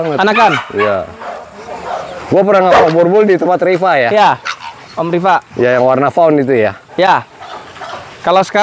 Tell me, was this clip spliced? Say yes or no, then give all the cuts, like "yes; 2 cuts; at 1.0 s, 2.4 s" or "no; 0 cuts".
no; 0 cuts